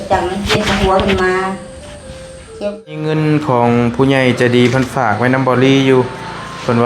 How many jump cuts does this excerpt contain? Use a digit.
1